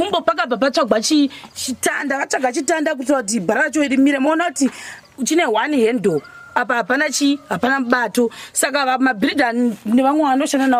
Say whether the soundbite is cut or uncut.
uncut